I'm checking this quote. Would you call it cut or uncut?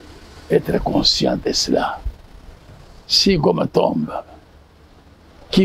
uncut